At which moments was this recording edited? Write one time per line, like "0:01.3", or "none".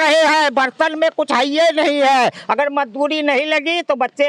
none